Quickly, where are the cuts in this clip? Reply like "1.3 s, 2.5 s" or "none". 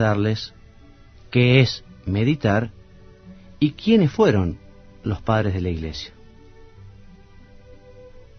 3.9 s